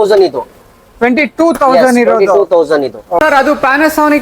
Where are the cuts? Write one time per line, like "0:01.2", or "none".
0:03.0